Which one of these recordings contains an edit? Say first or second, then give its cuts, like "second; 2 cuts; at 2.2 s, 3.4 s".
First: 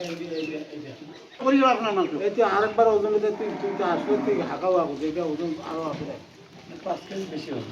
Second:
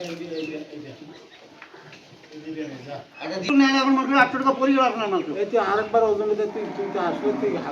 first; 1 cut; at 1.4 s